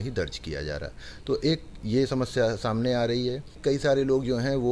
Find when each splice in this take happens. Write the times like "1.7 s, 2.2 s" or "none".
3.5 s